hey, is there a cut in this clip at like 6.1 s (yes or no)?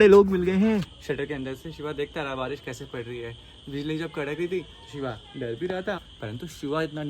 yes